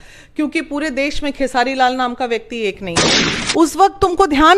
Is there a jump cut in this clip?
yes; 1 cut; at 3.3 s

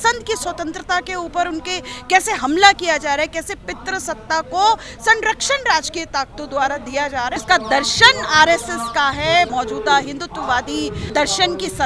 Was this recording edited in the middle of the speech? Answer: yes; 3 cuts; at 7.3 s, 9.5 s, 11.1 s

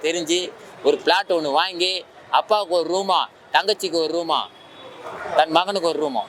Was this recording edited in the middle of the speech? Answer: no; 0 cuts

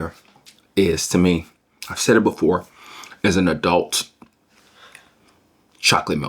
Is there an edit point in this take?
no; 0 cuts

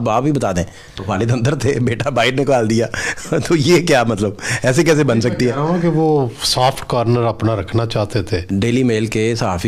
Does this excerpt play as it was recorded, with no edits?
no; 2 cuts; at 0.9 s, 8.5 s

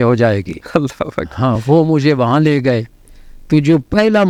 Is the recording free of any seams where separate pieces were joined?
yes; 0 cuts

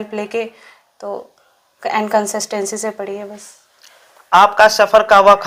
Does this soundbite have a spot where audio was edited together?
no; 0 cuts

